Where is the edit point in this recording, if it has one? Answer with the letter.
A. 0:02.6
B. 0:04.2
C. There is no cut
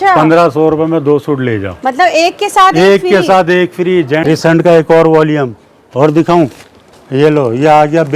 B